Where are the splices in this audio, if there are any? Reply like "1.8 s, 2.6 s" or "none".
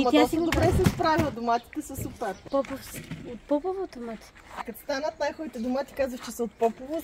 2.4 s, 4.7 s